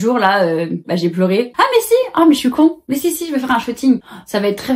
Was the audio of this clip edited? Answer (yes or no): yes